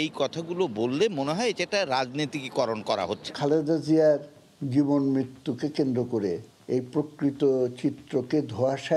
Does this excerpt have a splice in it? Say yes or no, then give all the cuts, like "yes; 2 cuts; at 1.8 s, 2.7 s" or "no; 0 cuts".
yes; 2 cuts; at 3.3 s, 6.5 s